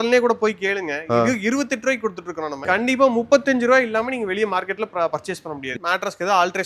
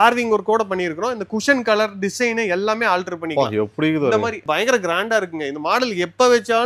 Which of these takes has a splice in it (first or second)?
first